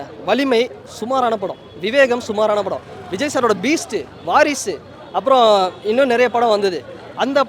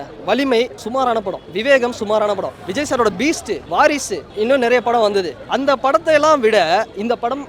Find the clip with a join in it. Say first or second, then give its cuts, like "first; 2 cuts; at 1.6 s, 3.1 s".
second; 5 cuts; at 1.1 s, 2.6 s, 3.6 s, 4.3 s, 5.4 s